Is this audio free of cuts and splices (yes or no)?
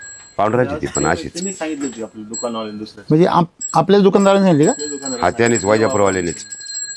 yes